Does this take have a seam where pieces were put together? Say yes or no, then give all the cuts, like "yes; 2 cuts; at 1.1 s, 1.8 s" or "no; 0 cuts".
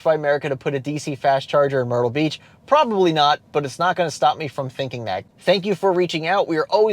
yes; 1 cut; at 5.3 s